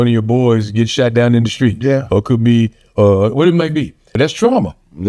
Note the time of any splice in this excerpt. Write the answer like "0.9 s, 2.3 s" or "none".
4.0 s